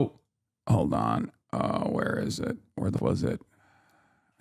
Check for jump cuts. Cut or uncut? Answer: cut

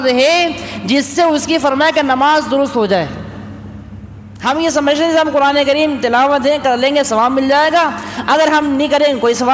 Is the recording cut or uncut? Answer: uncut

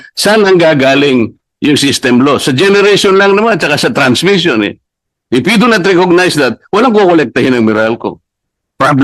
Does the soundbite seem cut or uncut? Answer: uncut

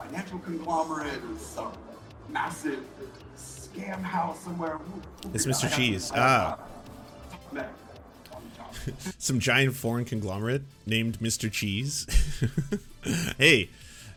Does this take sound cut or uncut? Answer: uncut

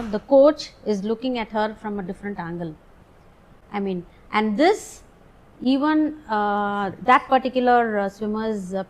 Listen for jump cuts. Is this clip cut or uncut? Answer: uncut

